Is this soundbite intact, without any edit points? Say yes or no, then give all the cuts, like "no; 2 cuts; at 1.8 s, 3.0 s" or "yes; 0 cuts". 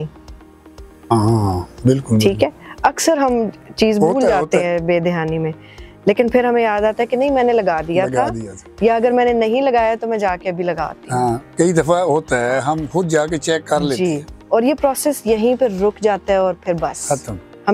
yes; 0 cuts